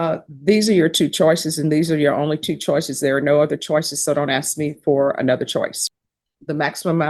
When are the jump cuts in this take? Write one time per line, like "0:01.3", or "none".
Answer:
0:05.8